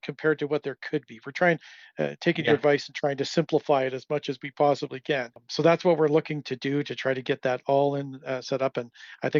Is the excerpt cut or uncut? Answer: cut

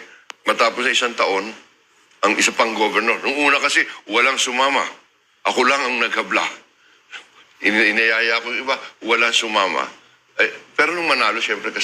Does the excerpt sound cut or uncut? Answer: uncut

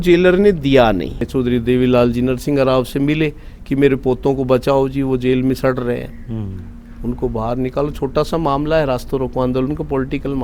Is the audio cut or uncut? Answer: cut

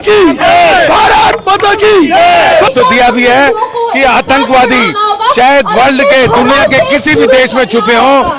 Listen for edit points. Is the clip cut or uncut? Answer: cut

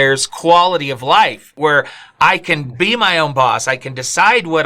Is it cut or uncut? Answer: cut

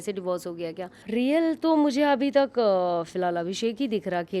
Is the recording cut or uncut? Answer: cut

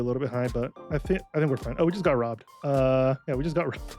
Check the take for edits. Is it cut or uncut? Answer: cut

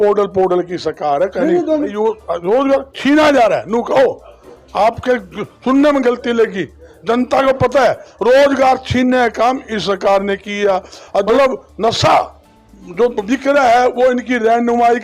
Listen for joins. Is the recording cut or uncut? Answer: cut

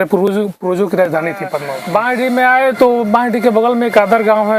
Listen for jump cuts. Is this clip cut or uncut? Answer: cut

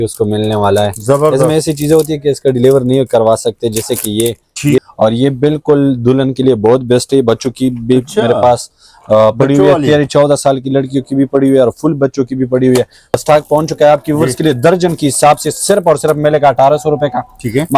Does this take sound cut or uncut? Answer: cut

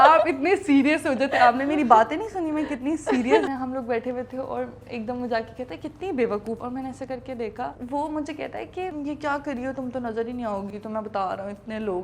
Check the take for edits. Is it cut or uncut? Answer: cut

